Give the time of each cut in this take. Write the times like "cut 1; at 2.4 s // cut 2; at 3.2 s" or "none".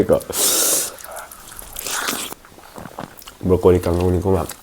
cut 1; at 2.3 s